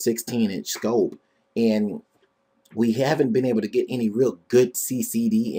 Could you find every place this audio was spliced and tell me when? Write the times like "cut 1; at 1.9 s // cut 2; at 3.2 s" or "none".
none

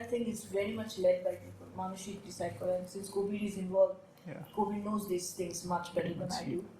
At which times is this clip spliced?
none

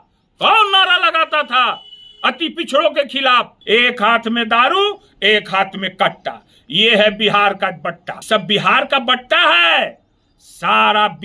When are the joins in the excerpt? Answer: cut 1; at 3.6 s // cut 2; at 8.1 s

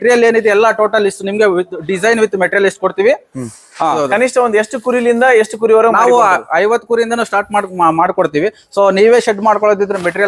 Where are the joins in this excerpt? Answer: cut 1; at 4.0 s

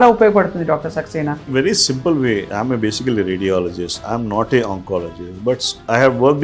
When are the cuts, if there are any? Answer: cut 1; at 1.5 s // cut 2; at 2.5 s

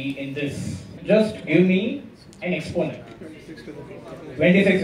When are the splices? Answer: cut 1; at 1.0 s // cut 2; at 3.1 s

